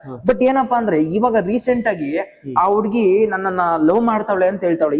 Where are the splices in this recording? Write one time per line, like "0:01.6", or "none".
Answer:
none